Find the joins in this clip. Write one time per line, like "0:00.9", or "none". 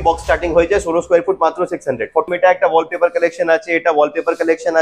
0:02.3